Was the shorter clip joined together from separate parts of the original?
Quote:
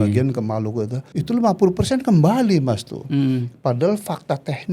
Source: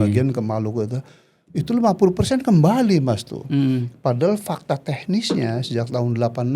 yes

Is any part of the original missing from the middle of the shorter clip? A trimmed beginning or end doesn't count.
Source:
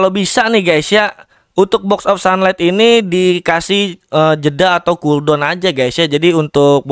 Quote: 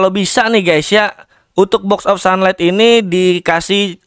no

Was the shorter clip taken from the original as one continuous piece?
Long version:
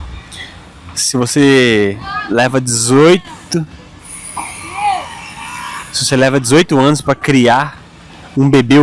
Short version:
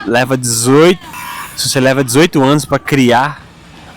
no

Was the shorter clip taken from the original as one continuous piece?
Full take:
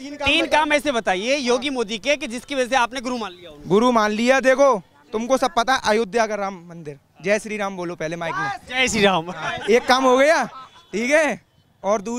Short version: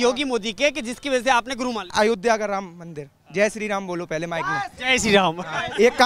no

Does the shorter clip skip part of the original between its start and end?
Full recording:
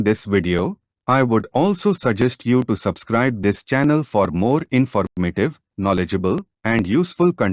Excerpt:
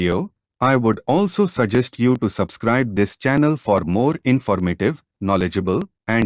yes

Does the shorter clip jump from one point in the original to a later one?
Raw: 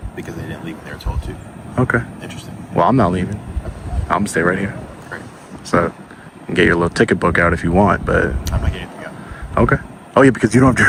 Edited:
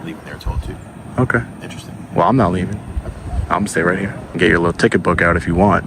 yes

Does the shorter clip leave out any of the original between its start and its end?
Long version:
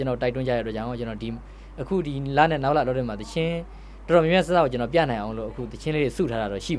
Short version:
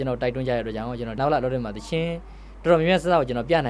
yes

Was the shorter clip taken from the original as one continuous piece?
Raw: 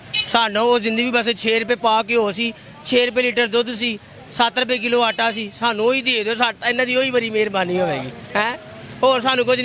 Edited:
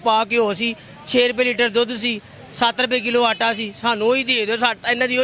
yes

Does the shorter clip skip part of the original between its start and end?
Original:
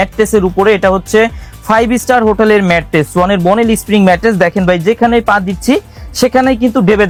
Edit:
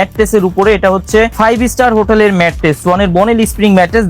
yes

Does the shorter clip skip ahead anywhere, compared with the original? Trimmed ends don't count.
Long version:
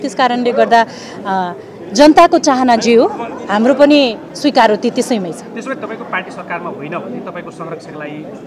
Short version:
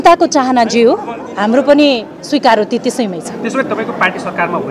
no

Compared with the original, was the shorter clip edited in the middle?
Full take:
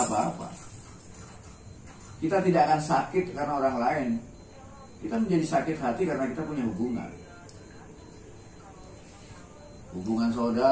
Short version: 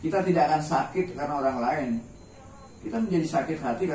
no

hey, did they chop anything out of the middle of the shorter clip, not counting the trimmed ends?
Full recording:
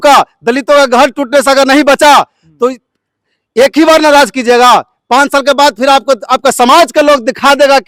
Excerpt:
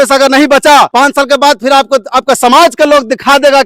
yes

